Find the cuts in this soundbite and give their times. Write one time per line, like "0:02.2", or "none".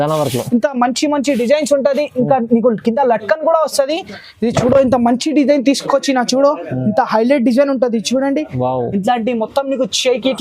0:04.1

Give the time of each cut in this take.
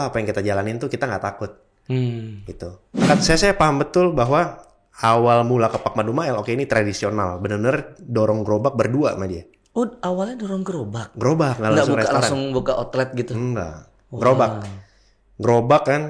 0:03.0

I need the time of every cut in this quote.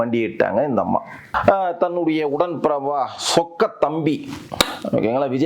0:01.3

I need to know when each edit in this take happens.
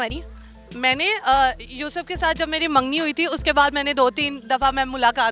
none

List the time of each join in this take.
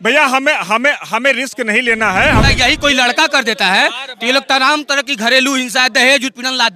0:02.4

